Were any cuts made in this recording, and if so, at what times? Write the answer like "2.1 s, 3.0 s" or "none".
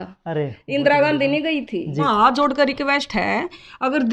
2.0 s